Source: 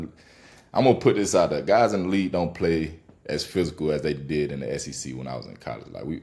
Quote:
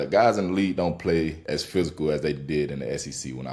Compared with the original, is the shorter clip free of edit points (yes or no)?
no